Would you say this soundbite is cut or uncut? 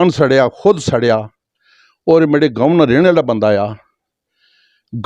uncut